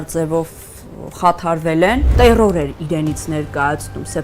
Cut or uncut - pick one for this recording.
cut